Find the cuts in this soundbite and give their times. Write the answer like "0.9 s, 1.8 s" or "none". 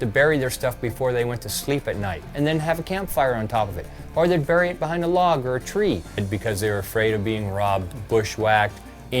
2.3 s, 6.2 s